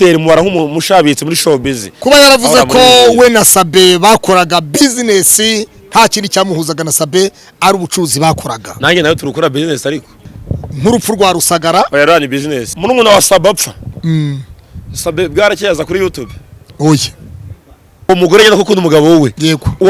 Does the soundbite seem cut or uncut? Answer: cut